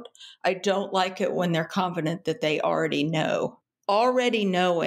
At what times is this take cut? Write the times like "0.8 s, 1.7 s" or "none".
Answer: 3.7 s